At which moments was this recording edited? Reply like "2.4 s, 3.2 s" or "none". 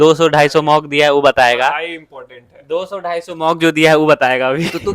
none